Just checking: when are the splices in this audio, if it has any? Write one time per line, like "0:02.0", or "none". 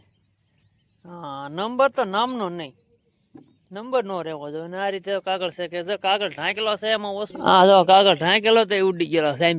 0:07.3

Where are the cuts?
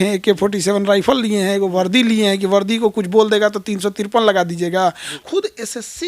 0:05.1

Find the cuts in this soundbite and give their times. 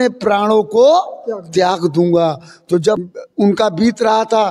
0:03.0

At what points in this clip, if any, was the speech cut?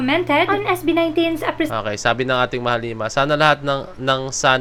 none

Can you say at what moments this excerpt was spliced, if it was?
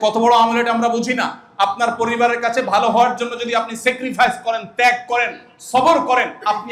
none

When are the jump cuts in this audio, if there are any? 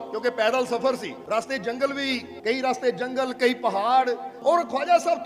0:01.1
0:02.3
0:04.3

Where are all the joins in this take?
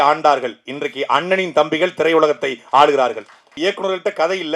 0:03.6

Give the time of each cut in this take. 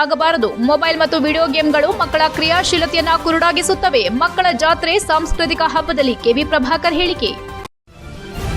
0:07.7

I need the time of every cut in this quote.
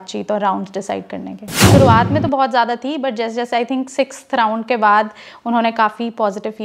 0:01.6

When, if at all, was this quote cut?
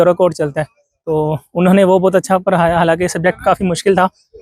none

